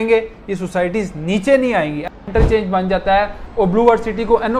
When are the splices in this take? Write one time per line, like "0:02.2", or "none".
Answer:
0:02.2